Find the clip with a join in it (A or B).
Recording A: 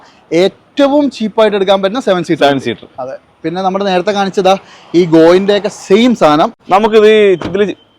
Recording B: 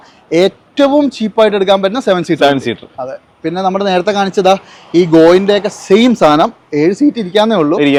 A